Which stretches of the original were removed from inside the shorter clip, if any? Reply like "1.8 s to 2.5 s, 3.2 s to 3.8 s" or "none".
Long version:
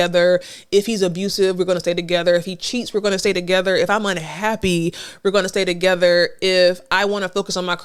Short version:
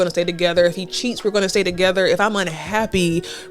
none